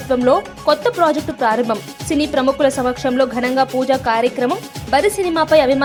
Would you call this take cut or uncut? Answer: uncut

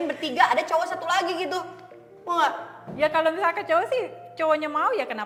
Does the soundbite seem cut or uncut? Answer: uncut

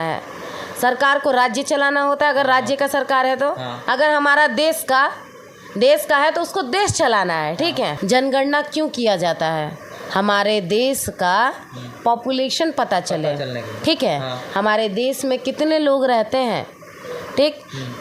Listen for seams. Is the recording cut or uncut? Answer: cut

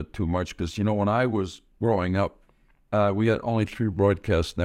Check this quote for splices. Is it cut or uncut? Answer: uncut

